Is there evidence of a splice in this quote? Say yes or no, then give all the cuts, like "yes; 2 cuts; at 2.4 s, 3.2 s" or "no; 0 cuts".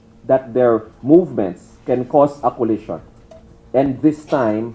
no; 0 cuts